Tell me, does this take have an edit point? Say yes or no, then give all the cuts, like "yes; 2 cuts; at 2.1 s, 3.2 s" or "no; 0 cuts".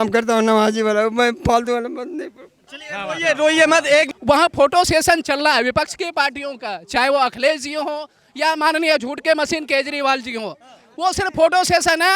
yes; 1 cut; at 4.1 s